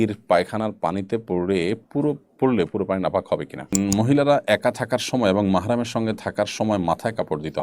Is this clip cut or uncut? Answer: cut